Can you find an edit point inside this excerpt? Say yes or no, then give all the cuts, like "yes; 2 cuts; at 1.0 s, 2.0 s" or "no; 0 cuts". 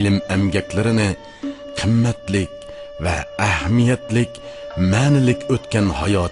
yes; 1 cut; at 1.6 s